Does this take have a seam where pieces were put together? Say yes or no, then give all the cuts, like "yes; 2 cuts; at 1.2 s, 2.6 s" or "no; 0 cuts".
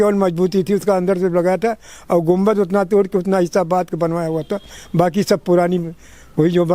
no; 0 cuts